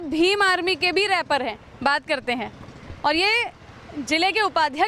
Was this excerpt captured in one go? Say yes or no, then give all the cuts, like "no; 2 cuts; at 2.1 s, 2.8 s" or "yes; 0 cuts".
yes; 0 cuts